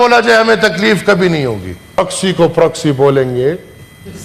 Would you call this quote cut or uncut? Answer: cut